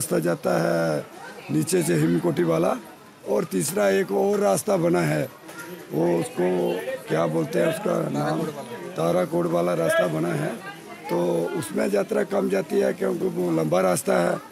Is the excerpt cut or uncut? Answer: uncut